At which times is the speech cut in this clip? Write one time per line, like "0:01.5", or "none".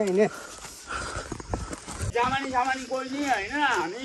0:02.1